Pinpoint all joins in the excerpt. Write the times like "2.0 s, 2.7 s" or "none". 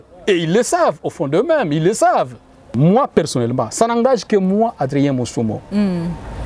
2.7 s